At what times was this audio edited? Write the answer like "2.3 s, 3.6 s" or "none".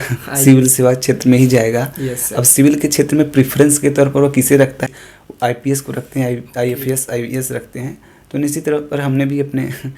4.9 s